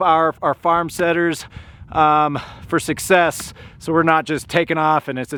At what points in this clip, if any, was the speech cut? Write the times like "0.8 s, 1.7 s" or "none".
none